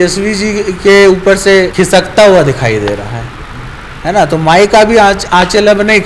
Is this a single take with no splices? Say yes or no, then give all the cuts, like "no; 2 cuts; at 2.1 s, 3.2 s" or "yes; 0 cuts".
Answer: yes; 0 cuts